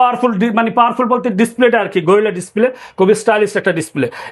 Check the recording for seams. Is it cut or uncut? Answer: uncut